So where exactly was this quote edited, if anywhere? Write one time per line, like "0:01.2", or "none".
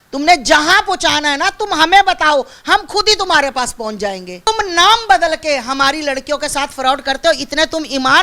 0:04.4